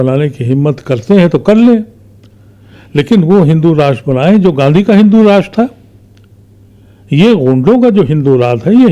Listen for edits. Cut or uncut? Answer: uncut